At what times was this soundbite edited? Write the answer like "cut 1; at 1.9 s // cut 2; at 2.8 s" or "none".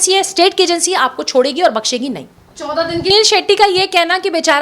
cut 1; at 3.1 s

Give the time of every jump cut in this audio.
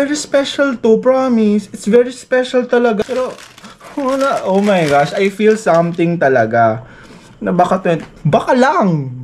cut 1; at 3.1 s

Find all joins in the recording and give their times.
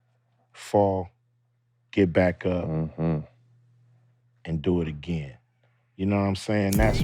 none

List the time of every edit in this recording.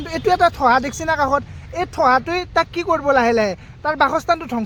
none

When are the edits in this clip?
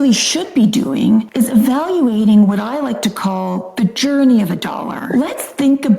none

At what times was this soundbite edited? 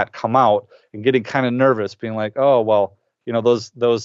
none

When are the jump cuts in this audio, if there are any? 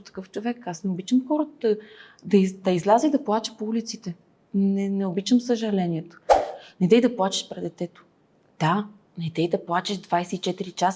cut 1; at 6.5 s

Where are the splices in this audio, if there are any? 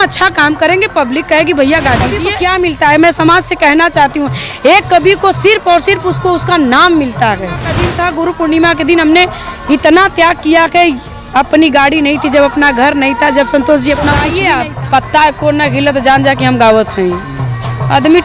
cut 1; at 2.2 s // cut 2; at 7.8 s // cut 3; at 14.3 s

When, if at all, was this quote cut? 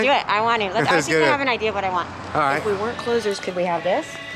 cut 1; at 2.6 s

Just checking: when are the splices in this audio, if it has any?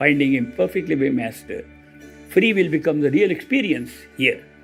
none

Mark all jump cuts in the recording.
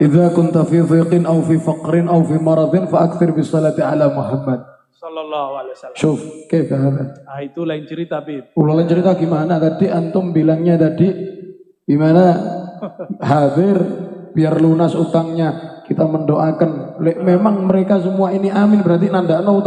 none

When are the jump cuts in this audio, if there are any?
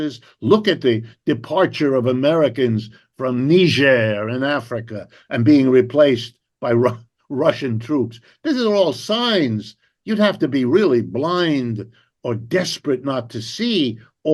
none

